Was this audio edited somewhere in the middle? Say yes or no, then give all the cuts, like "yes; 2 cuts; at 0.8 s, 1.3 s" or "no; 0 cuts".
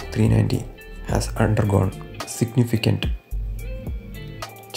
no; 0 cuts